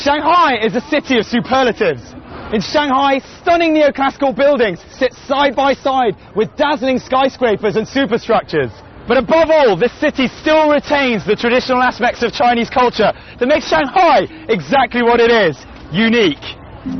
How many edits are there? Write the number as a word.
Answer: zero